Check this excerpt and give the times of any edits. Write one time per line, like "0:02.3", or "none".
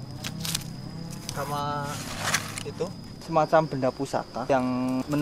0:03.3